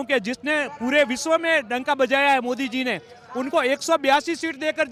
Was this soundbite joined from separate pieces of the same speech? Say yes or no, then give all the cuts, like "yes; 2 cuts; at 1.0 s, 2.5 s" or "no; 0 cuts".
no; 0 cuts